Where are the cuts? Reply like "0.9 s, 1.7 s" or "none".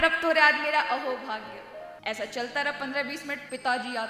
1.9 s